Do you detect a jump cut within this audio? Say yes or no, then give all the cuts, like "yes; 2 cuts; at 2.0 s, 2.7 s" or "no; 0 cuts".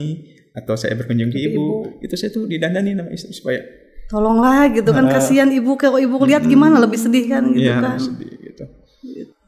no; 0 cuts